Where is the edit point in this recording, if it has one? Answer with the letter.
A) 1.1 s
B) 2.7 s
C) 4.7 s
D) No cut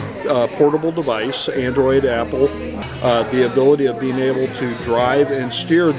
B